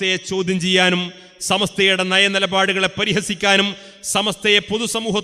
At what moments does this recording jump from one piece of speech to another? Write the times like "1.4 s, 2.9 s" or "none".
none